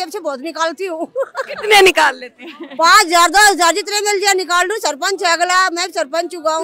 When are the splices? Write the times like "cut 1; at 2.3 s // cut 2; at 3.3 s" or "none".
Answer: none